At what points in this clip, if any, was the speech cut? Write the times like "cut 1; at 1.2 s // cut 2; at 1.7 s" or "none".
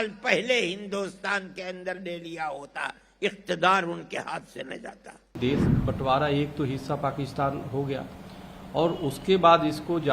cut 1; at 5.4 s

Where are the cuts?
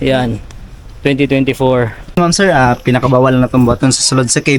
cut 1; at 2.0 s

